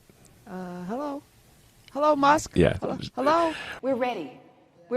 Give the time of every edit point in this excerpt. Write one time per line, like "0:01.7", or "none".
0:03.7